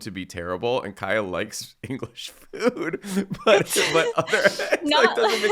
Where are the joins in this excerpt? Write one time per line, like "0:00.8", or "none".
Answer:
none